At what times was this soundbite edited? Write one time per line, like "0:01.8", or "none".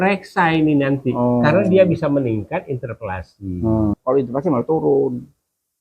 0:04.0